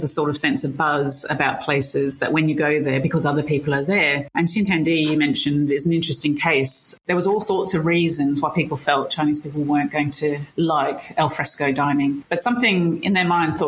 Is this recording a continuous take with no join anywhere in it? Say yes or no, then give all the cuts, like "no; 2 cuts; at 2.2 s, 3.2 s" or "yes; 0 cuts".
no; 4 cuts; at 4.3 s, 6.9 s, 10.5 s, 12.2 s